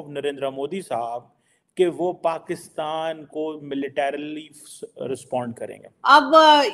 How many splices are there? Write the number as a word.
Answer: one